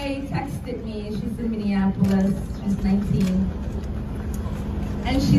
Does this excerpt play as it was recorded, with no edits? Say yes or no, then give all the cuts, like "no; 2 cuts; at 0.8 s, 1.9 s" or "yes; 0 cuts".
yes; 0 cuts